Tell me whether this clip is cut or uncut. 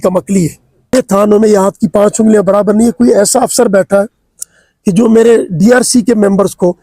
cut